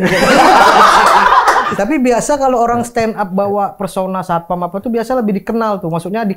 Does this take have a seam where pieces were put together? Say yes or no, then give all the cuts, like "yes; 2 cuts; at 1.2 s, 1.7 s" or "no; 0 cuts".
yes; 1 cut; at 1.7 s